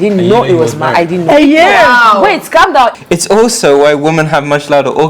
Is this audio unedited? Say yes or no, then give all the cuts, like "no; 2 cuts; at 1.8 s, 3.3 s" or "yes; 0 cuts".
no; 1 cut; at 2.9 s